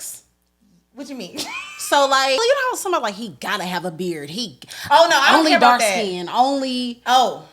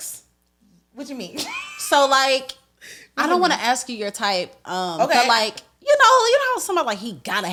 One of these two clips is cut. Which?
first; 1 cut; at 2.4 s

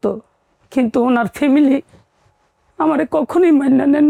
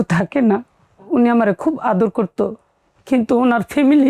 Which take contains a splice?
second; 1 cut; at 0.9 s

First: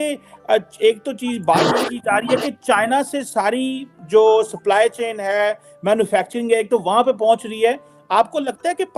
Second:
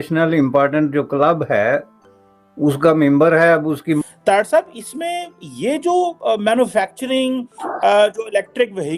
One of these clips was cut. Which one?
second; 1 cut; at 4.0 s

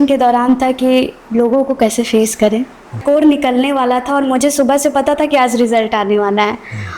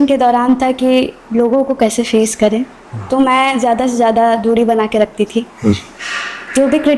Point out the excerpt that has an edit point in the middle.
first; 1 cut; at 3.0 s

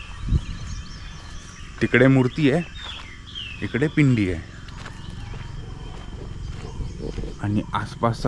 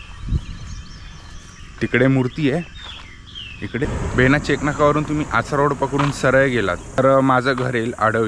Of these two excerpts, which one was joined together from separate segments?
second; 2 cuts; at 3.9 s, 7.0 s

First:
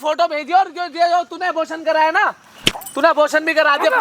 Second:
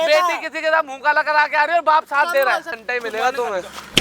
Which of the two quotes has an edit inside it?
second; 1 cut; at 2.8 s

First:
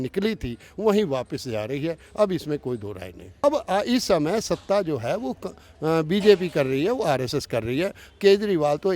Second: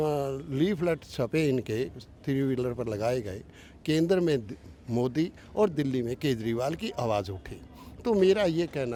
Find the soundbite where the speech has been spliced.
first; 1 cut; at 3.4 s

